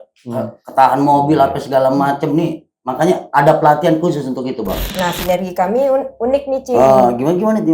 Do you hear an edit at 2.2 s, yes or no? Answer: no